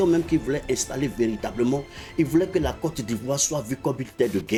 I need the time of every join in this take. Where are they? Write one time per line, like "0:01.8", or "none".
none